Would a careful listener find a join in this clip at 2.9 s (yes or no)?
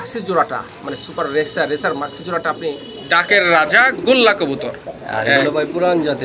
yes